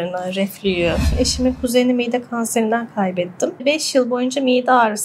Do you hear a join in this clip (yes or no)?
yes